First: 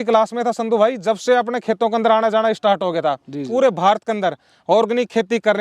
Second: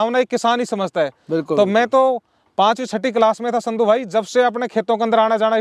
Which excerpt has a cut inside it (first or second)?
first